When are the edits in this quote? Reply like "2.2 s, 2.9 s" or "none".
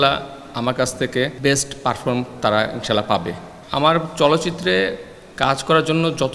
1.3 s, 3.5 s

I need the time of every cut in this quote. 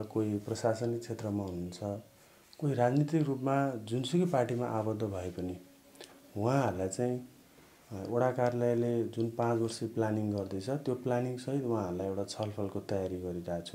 none

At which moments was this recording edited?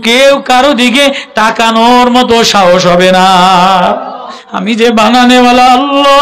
4.5 s

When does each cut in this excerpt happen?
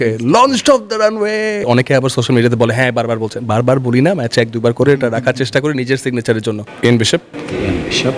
1.6 s, 6.7 s

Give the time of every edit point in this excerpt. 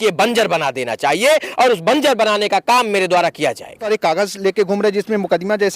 3.8 s

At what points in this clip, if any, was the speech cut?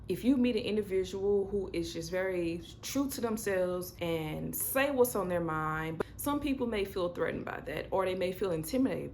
3.9 s, 5.9 s

